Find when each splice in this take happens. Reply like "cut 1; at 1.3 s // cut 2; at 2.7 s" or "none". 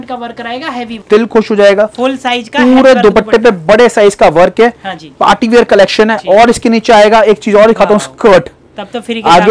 cut 1; at 1.0 s